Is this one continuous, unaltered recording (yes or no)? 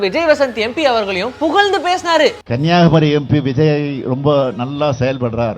no